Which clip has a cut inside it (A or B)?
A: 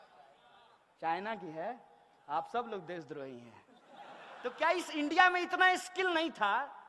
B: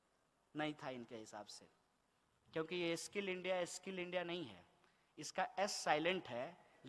A